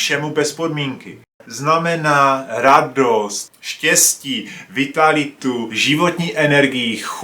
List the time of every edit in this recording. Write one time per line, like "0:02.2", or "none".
0:01.4
0:05.7